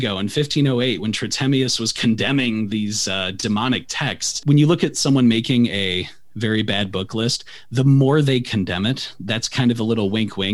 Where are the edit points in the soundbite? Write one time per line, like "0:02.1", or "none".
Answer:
0:04.4